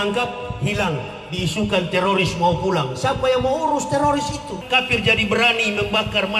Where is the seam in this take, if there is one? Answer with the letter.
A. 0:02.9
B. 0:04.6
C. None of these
B